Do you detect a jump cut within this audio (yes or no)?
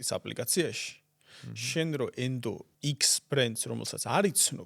yes